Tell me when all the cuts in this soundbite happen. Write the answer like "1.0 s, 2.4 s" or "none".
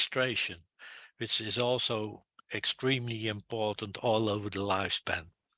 none